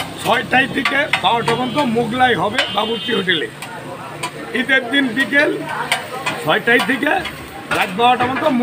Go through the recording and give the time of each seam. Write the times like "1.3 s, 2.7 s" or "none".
none